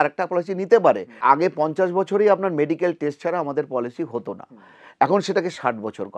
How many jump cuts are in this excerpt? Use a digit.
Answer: 1